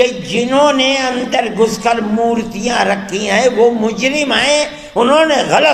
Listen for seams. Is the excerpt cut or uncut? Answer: uncut